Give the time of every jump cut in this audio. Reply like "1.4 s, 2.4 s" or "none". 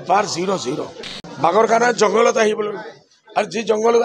0.9 s